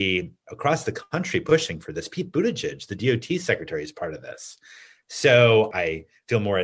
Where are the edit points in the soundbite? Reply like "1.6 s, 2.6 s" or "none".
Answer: 5.7 s